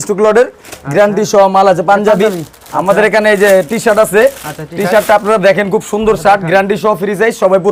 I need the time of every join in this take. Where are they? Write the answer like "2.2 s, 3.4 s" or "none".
none